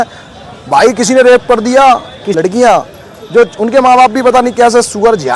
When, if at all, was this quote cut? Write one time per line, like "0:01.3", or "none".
0:02.2